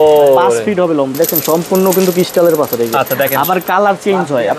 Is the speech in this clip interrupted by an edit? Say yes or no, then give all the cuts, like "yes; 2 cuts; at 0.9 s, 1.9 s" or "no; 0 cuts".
yes; 1 cut; at 1.1 s